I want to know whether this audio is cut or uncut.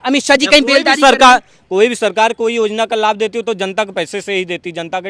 uncut